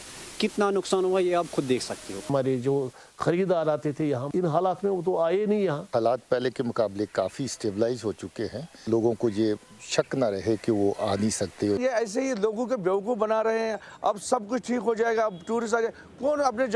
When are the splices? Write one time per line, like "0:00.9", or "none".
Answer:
0:02.3
0:05.8
0:08.9
0:11.8